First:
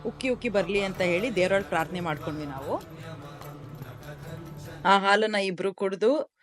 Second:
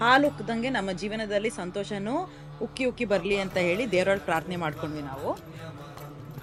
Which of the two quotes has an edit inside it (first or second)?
first